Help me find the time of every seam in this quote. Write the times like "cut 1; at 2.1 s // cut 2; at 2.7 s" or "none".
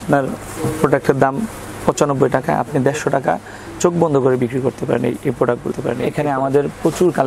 none